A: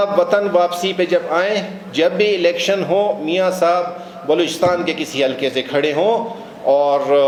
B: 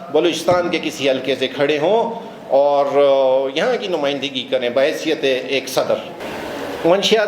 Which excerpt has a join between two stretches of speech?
B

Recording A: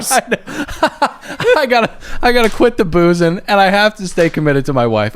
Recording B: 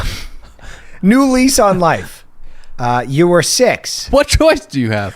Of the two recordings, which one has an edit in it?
B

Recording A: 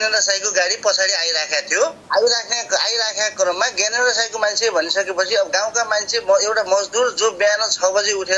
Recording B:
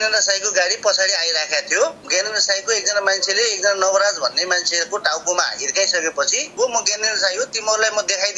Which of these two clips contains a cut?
B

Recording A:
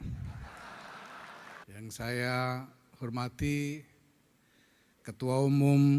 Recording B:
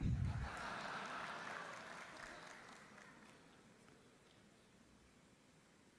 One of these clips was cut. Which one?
A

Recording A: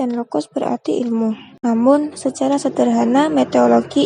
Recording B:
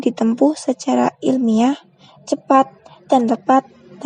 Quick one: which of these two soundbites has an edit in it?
A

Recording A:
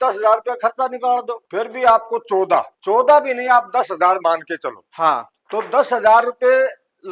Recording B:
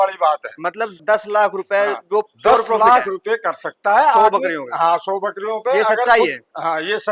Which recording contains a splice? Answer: A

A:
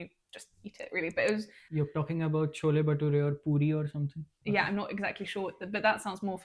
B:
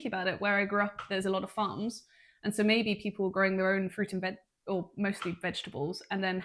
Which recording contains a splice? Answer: A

